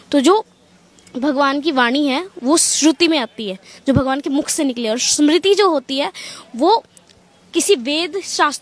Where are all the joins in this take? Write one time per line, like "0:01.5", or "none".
none

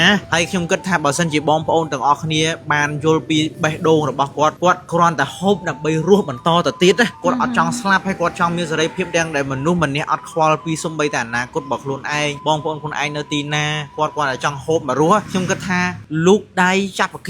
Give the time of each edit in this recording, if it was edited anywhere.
none

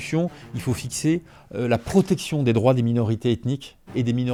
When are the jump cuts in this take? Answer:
none

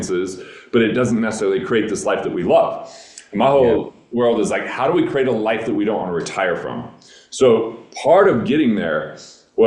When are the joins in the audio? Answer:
none

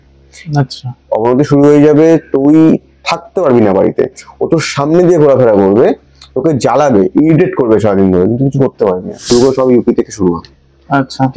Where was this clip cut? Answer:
0:09.3

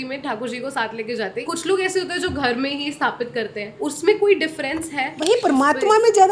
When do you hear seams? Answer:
0:01.4
0:03.6
0:05.0

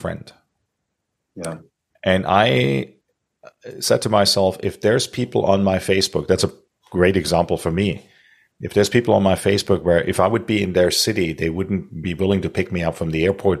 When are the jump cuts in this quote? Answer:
none

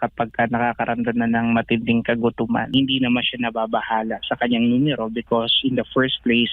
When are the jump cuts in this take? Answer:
0:02.7

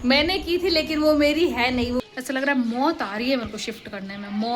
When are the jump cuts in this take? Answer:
0:02.0

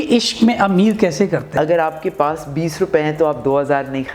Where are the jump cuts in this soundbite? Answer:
0:01.5

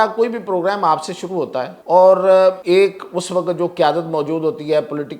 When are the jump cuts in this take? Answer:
0:01.8
0:02.6

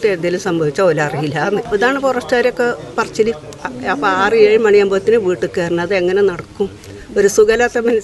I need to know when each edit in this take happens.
0:01.7
0:03.6

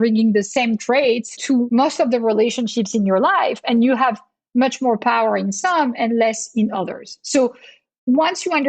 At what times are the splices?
0:01.6

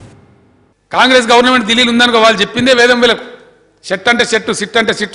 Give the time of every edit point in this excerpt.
0:00.9

